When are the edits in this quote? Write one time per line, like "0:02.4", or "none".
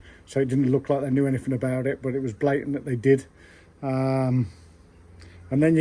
none